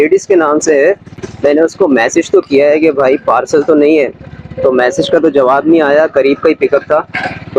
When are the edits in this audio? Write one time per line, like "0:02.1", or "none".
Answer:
none